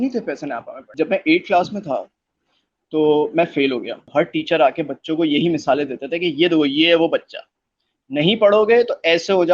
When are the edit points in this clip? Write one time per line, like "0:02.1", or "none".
0:00.9
0:04.0